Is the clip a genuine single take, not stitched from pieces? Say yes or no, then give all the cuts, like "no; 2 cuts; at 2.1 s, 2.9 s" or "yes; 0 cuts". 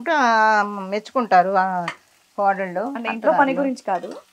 yes; 0 cuts